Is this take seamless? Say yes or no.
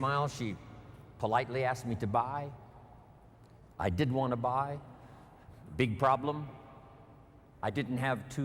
yes